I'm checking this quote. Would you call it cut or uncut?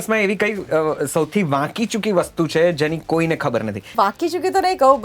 cut